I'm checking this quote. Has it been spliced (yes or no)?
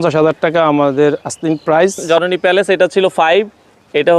yes